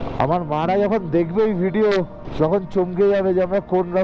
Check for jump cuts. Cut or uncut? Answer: cut